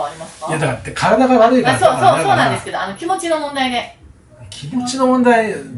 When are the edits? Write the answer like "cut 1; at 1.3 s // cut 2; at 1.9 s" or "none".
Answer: none

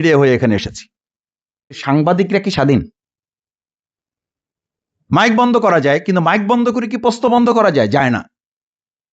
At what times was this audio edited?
cut 1; at 1.8 s

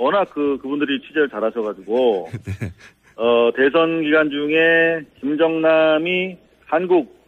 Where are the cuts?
cut 1; at 3.7 s

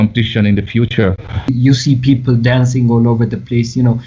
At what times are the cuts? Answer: cut 1; at 1.5 s

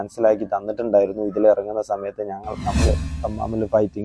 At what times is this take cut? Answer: cut 1; at 2.9 s

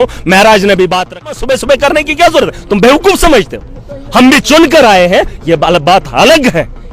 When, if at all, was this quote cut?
cut 1; at 1.4 s

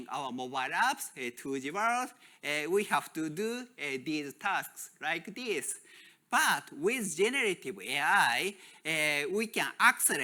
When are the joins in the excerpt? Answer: none

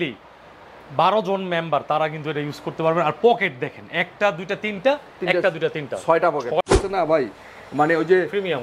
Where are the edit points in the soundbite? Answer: cut 1; at 6.6 s

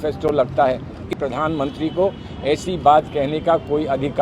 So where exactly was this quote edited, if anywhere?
cut 1; at 1.1 s

